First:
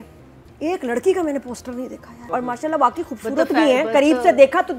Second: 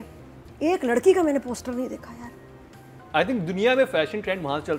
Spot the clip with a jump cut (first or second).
first